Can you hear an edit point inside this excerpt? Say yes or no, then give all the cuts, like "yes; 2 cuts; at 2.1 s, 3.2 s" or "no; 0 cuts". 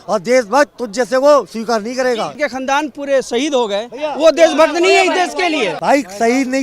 yes; 2 cuts; at 2.3 s, 5.7 s